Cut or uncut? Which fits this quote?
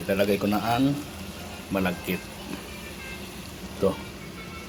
uncut